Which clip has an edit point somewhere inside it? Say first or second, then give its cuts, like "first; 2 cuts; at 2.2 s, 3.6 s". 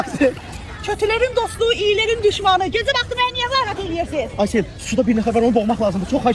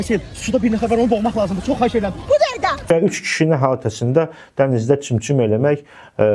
second; 1 cut; at 2.8 s